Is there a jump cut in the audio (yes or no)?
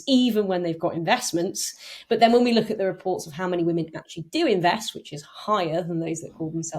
no